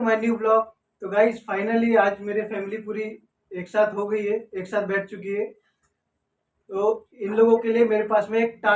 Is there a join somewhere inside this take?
no; 0 cuts

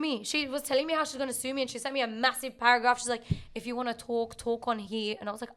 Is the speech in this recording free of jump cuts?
yes; 0 cuts

